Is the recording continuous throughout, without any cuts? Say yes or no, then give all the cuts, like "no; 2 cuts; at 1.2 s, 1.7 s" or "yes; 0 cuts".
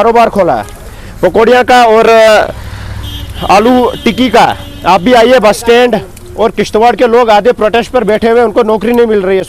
yes; 0 cuts